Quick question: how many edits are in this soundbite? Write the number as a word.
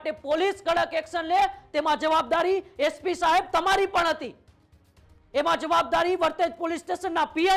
zero